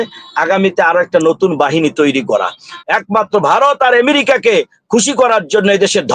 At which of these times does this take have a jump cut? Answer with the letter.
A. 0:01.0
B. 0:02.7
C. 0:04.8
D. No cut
B